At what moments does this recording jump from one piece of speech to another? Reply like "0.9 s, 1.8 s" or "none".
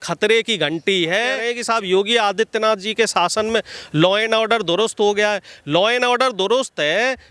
1.5 s